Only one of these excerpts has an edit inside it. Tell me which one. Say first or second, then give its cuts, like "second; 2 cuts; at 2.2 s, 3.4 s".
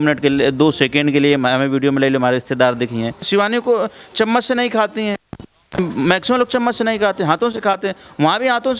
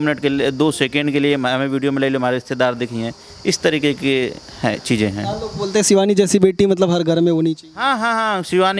first; 1 cut; at 3.2 s